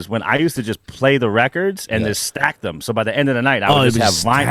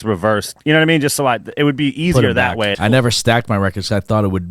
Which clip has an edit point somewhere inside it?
second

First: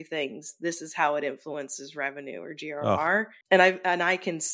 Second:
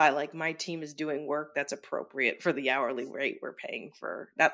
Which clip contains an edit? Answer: first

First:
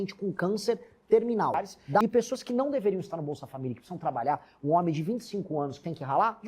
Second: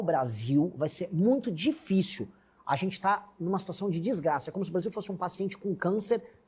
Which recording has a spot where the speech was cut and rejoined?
first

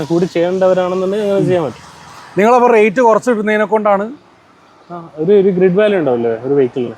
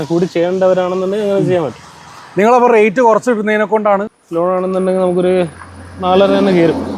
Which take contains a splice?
second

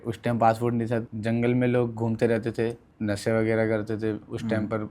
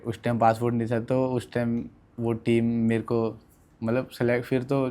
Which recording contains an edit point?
first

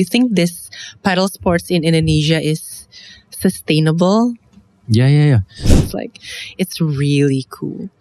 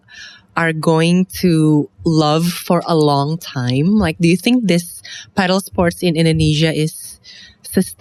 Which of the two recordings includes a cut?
first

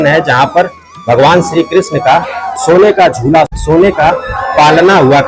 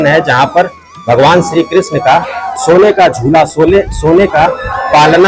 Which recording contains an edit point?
first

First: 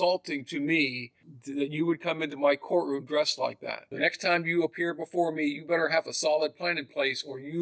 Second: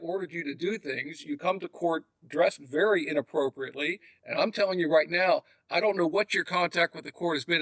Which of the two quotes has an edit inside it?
first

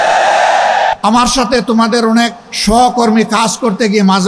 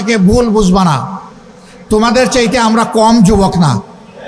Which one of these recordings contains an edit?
first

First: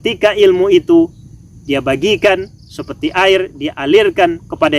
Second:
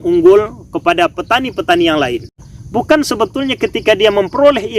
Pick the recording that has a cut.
second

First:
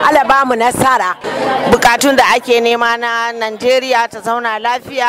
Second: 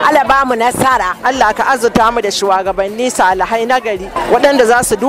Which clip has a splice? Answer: second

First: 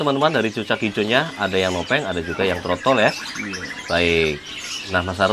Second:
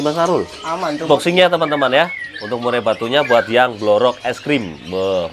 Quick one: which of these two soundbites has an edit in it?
second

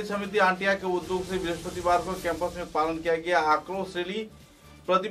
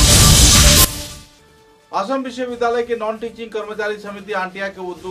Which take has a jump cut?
second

